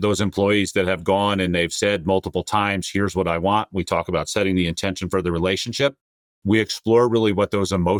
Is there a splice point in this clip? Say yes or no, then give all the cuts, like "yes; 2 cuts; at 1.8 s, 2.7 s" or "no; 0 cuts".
no; 0 cuts